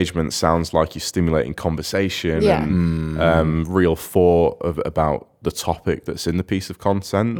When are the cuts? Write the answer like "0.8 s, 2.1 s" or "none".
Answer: none

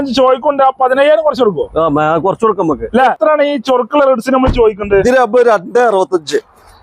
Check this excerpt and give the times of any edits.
3.1 s

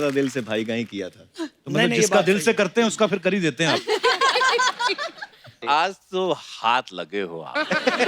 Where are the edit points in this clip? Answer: 5.6 s

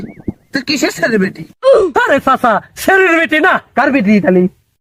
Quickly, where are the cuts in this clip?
none

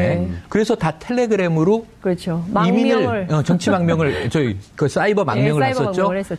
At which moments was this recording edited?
none

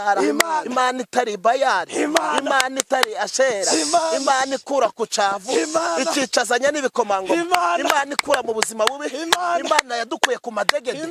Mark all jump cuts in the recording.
none

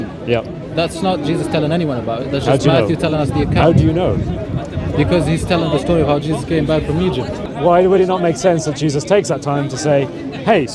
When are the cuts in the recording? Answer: 7.5 s

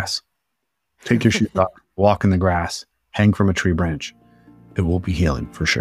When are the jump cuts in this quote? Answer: 4.6 s

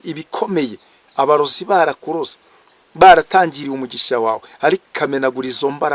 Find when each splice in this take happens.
none

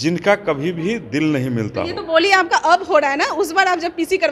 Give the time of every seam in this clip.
none

